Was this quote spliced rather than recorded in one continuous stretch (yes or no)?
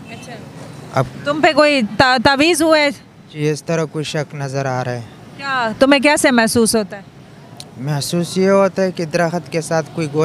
no